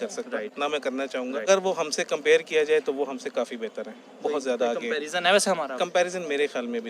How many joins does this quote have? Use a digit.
1